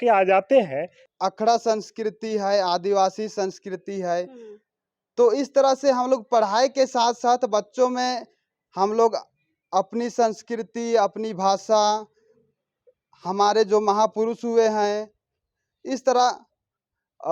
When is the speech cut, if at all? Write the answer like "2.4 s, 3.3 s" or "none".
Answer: 1.0 s